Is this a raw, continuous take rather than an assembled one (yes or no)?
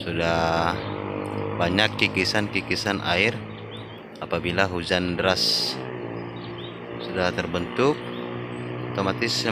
yes